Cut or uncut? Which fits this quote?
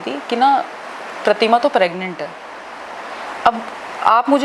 uncut